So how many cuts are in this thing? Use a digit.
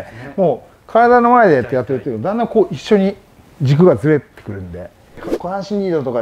1